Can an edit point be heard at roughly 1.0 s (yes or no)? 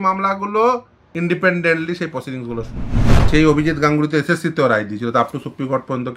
yes